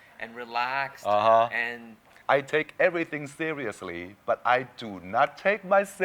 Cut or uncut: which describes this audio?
cut